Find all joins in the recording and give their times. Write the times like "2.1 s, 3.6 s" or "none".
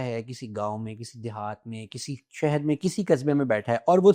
none